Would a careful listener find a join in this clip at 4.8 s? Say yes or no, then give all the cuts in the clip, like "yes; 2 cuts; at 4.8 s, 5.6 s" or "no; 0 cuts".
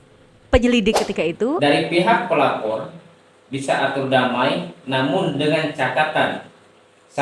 no; 1 cut; at 1.6 s